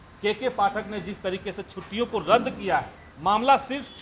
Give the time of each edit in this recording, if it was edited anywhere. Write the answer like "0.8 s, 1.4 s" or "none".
3.0 s